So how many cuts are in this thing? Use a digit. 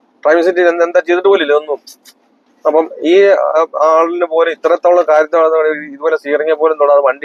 0